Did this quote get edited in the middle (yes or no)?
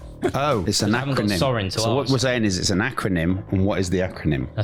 no